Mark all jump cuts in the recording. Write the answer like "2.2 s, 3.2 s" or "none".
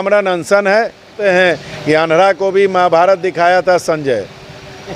1.0 s